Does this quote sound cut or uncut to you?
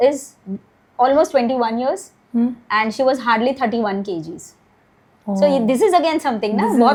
uncut